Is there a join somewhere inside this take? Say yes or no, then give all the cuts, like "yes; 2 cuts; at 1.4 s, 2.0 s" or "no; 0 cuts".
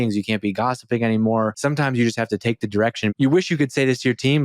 yes; 2 cuts; at 1.6 s, 3.1 s